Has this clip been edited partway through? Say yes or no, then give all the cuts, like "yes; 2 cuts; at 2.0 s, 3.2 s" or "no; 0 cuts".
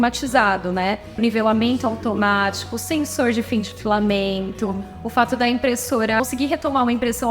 yes; 2 cuts; at 1.1 s, 6.2 s